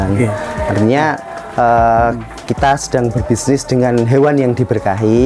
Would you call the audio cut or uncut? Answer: uncut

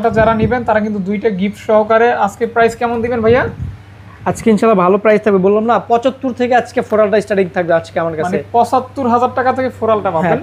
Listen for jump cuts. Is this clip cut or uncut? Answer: uncut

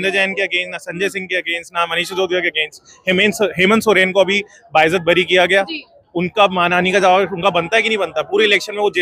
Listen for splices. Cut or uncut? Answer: uncut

